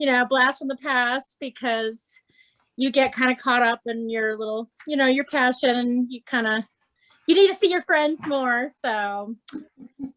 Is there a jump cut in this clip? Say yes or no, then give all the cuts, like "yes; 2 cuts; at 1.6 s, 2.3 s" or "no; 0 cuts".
no; 0 cuts